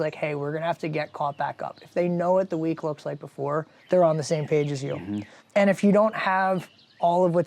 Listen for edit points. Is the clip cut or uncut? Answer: cut